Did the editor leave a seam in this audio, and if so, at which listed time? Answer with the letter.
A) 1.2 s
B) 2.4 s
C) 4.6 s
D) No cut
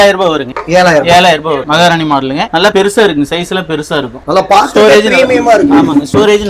D